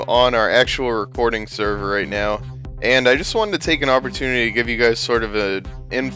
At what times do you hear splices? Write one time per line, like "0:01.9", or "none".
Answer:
none